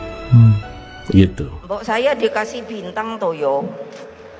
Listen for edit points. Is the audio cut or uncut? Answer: cut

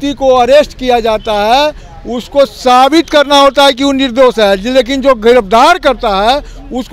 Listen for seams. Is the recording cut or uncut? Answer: uncut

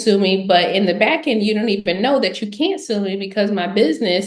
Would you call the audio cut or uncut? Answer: uncut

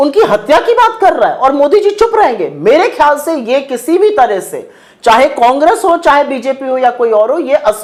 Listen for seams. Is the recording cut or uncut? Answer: uncut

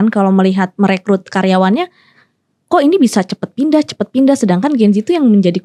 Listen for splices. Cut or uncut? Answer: uncut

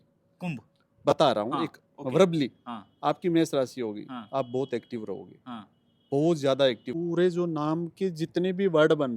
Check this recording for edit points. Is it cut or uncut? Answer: cut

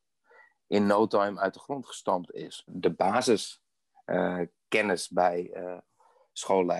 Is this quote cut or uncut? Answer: cut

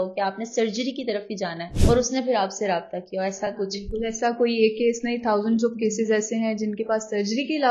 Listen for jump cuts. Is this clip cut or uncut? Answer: cut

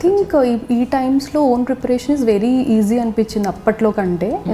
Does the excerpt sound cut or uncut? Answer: uncut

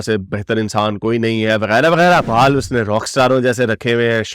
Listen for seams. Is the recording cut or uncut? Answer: cut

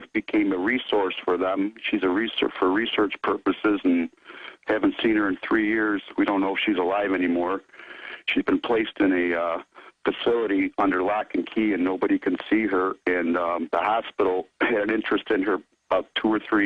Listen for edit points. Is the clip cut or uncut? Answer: uncut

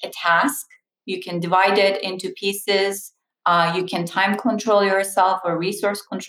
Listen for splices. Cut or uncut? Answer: uncut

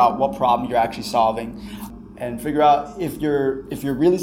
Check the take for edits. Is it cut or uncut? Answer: cut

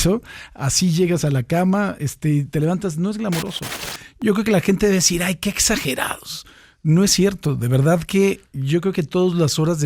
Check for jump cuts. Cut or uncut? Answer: cut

